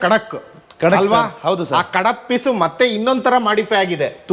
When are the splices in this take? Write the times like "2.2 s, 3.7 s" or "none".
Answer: none